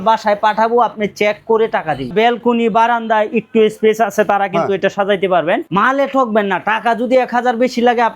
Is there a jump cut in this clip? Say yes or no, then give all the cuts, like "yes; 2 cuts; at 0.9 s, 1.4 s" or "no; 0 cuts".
yes; 2 cuts; at 2.1 s, 5.7 s